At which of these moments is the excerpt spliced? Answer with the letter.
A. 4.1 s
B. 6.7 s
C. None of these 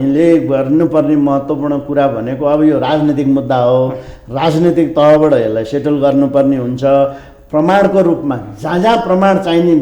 C